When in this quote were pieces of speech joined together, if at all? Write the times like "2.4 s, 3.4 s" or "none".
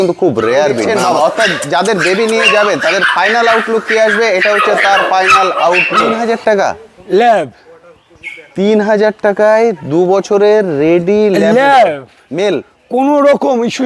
0.8 s, 6.1 s